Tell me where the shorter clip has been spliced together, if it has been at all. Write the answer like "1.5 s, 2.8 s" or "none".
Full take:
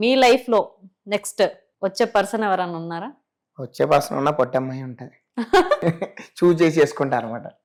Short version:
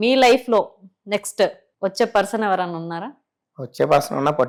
none